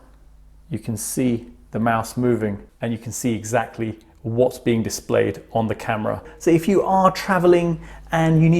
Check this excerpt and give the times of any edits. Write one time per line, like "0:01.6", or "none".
0:02.7
0:06.3

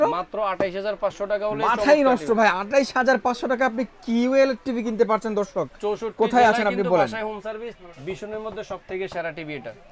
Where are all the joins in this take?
0:07.8

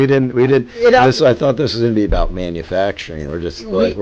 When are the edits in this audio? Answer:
none

